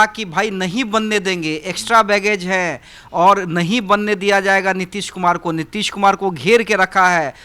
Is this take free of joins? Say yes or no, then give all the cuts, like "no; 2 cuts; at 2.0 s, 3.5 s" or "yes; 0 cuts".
yes; 0 cuts